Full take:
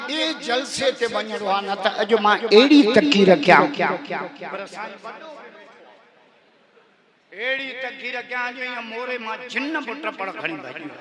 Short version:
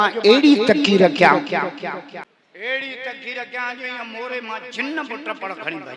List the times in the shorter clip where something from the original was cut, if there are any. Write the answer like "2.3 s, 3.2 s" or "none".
2.2 s